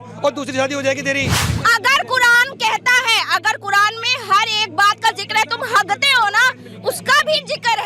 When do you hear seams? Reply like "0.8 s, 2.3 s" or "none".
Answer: 1.4 s